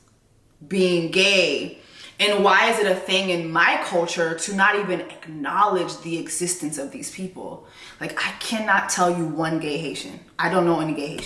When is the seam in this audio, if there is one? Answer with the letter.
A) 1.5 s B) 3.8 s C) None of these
C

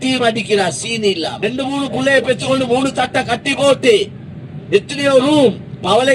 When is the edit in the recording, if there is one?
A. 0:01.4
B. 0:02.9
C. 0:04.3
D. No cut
A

